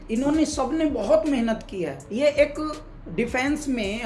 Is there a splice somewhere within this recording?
yes; 1 cut; at 2.0 s

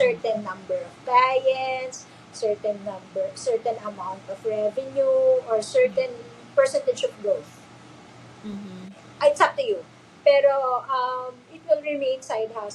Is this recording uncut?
yes; 0 cuts

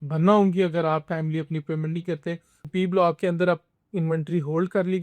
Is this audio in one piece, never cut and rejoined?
no; 1 cut; at 2.7 s

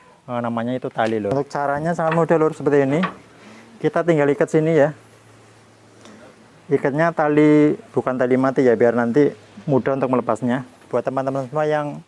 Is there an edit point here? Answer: yes; 2 cuts; at 1.3 s, 10.9 s

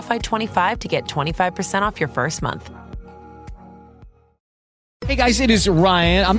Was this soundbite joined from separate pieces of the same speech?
yes; 1 cut; at 4.8 s

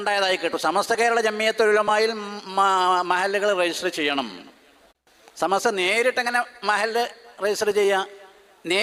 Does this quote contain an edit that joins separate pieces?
no; 0 cuts

